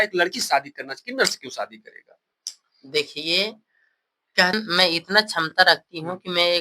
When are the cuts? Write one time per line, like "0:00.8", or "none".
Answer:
0:04.5

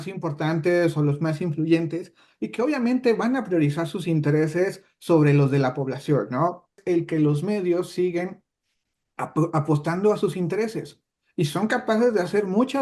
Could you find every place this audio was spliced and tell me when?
0:06.8

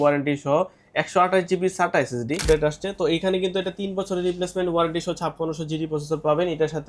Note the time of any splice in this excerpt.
0:02.4

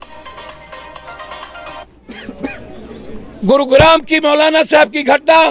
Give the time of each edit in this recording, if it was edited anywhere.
0:02.1

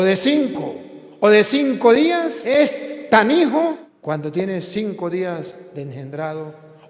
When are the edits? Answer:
0:02.4
0:03.9

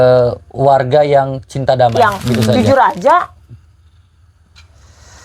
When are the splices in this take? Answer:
0:02.2

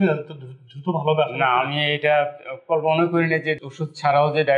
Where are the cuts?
0:03.6

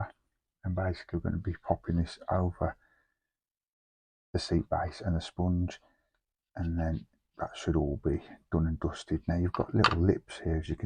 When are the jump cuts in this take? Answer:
none

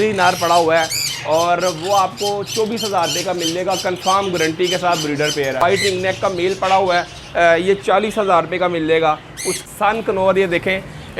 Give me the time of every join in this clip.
0:05.6
0:09.6

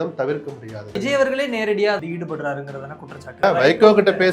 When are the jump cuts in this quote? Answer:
0:01.0
0:02.0
0:03.4

